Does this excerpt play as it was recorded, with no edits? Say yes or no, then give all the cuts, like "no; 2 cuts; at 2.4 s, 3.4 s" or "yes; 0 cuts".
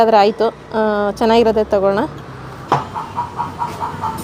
no; 1 cut; at 2.6 s